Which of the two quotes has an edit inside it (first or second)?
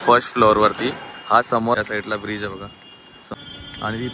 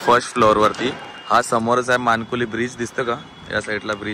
first